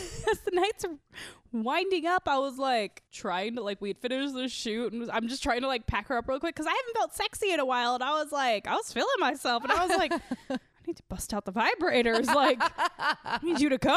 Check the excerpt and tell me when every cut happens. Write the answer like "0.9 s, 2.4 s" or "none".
none